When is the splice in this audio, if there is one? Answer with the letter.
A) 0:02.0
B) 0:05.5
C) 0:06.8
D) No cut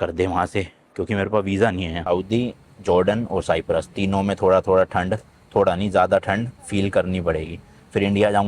A